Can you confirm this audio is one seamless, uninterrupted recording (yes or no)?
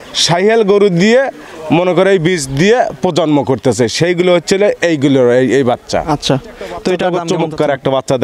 no